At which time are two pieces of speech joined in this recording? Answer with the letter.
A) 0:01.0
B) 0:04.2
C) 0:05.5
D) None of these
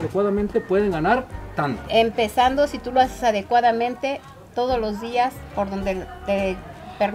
D